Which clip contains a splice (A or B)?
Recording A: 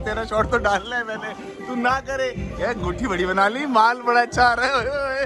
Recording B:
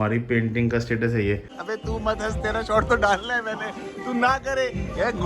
B